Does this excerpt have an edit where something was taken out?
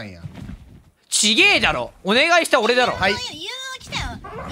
no; 0 cuts

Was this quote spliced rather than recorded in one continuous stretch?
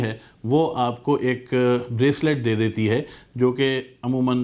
no; 0 cuts

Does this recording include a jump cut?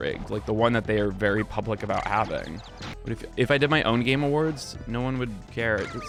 no; 0 cuts

